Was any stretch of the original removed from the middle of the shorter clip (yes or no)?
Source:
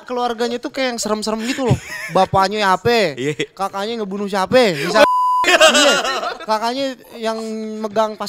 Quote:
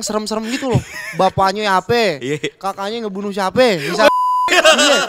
no